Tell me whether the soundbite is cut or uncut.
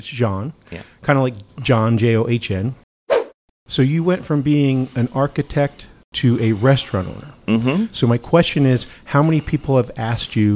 cut